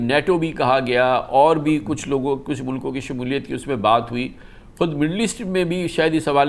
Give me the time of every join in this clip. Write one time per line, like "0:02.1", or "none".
none